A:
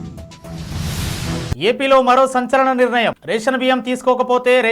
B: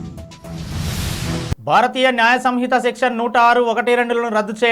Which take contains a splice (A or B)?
A